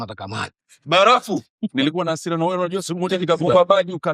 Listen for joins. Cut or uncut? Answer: cut